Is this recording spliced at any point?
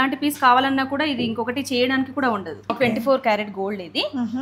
yes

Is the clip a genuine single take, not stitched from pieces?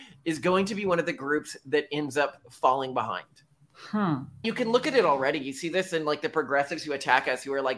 no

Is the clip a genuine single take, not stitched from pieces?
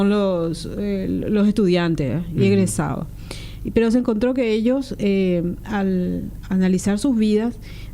no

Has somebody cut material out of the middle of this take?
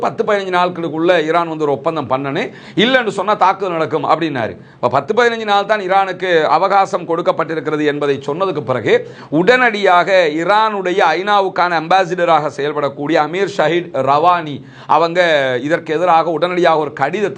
no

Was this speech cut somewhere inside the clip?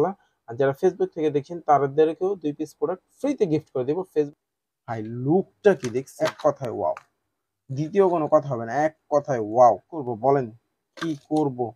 yes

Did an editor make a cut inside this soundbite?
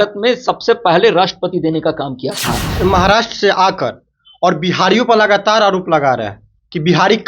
yes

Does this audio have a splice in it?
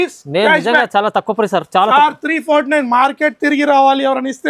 no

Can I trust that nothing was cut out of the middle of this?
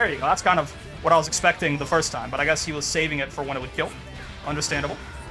yes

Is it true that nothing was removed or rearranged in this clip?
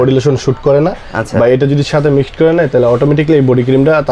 yes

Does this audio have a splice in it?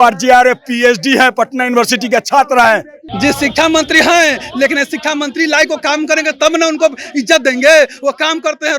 yes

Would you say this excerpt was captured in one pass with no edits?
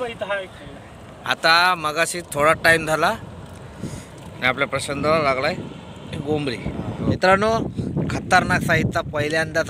no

